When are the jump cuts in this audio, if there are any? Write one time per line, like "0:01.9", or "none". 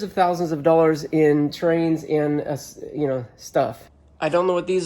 0:03.9